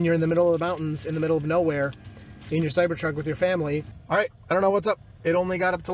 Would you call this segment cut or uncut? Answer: cut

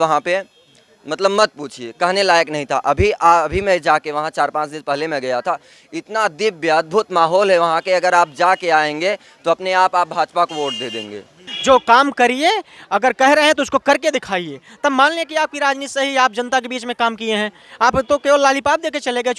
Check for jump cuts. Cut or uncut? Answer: cut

